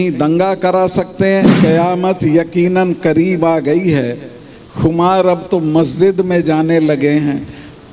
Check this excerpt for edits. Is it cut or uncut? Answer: cut